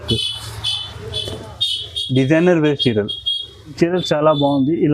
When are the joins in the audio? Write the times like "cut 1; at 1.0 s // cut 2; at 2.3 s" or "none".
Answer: cut 1; at 3.7 s